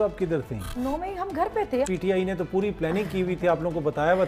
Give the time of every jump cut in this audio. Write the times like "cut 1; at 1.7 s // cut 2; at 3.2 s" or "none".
cut 1; at 0.7 s // cut 2; at 1.9 s